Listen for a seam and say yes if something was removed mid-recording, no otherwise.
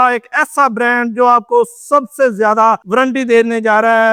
no